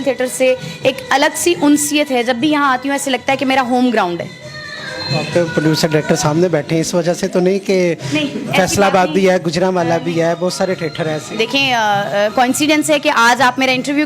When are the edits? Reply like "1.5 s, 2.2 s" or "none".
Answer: none

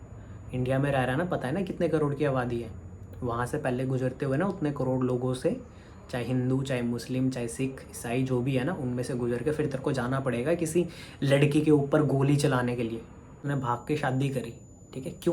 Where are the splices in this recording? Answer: 13.4 s

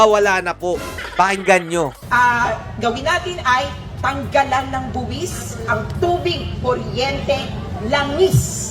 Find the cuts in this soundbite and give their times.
none

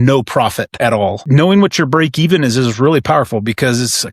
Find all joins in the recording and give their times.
1.1 s

